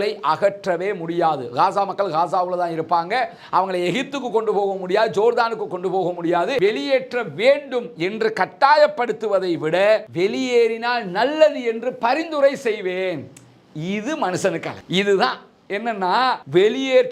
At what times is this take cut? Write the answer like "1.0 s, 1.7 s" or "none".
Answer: 6.5 s